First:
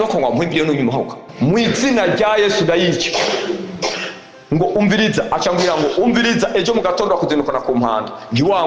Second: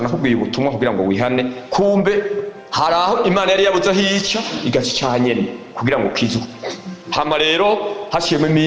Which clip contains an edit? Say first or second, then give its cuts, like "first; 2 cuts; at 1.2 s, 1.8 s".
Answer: first; 1 cut; at 1.1 s